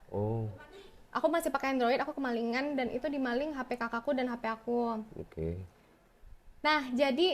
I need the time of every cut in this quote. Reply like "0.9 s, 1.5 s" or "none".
none